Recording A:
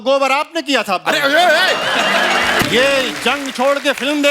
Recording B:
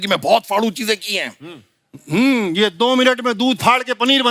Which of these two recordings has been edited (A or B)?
A